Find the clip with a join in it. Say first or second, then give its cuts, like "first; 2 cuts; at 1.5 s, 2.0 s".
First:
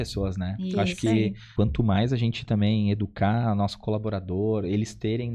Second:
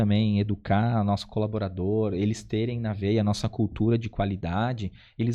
first; 1 cut; at 1.4 s